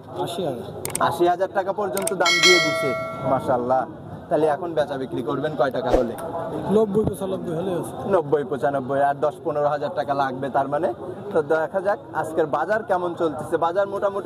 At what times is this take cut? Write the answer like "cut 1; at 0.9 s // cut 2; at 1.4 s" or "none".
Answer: none